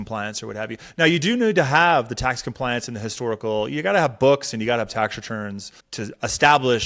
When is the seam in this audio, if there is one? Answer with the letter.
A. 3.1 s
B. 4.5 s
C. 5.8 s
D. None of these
D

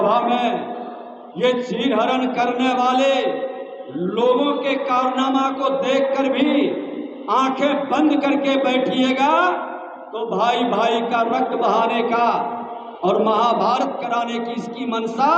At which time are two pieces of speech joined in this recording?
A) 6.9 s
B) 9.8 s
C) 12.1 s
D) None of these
D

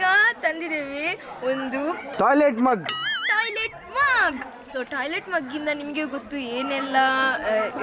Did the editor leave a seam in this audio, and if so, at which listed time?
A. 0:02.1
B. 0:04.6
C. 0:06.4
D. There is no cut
A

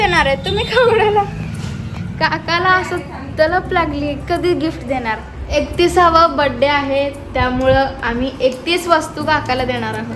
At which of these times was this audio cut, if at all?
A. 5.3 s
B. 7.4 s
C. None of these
A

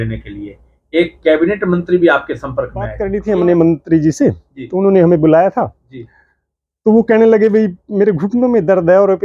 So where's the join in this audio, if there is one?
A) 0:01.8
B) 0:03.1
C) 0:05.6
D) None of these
B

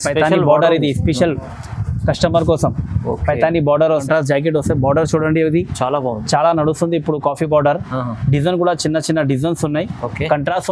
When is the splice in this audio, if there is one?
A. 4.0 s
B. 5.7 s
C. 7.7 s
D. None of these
A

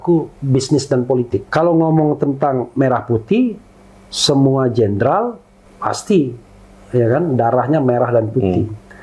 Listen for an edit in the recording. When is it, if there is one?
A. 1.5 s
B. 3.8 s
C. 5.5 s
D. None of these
A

